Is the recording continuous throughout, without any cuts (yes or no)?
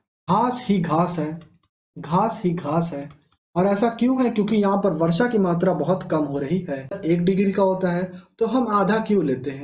no